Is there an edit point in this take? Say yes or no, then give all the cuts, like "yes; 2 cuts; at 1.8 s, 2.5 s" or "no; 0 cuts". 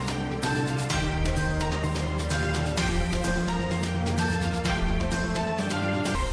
no; 0 cuts